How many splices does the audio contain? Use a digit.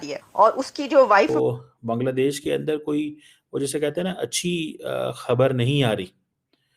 1